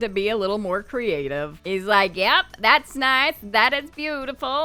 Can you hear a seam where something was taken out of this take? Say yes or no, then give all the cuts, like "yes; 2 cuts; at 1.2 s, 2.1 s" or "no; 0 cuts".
no; 0 cuts